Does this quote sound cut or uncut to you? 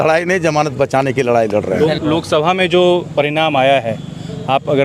uncut